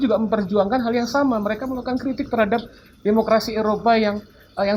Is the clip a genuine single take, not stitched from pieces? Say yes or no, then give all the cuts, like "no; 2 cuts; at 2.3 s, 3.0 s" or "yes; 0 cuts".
yes; 0 cuts